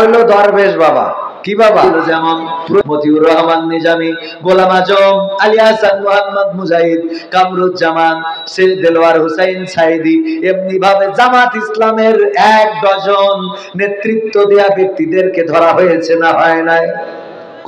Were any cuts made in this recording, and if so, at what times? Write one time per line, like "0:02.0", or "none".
0:01.9